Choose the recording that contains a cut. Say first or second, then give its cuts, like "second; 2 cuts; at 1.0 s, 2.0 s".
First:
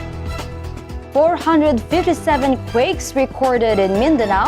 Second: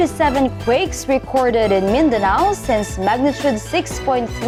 first; 1 cut; at 1.1 s